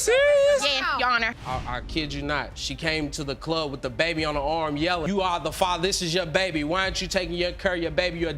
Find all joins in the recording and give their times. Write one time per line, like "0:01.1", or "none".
0:01.3